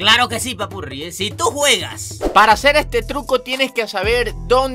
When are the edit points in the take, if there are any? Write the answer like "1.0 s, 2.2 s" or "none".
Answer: 2.3 s